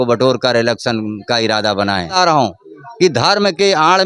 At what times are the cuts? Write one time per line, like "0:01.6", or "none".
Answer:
0:02.1